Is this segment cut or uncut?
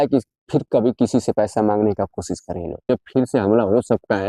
cut